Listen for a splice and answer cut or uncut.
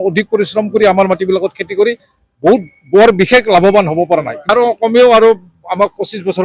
cut